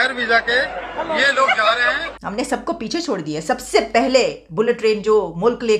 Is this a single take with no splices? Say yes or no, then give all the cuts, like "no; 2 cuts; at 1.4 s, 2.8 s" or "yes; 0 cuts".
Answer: no; 1 cut; at 2.1 s